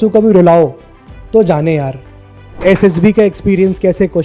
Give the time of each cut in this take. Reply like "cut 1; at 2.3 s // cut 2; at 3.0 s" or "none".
cut 1; at 2.6 s